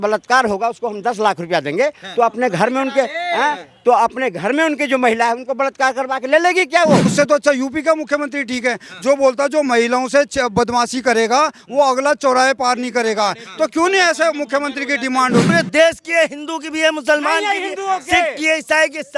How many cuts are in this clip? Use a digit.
2